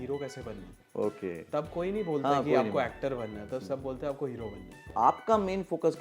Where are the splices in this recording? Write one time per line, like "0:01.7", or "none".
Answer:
0:04.9

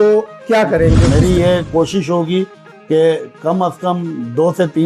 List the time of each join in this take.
0:01.0

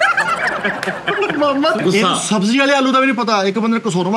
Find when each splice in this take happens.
0:01.8

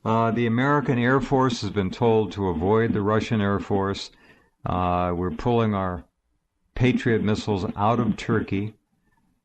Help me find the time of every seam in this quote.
0:05.8

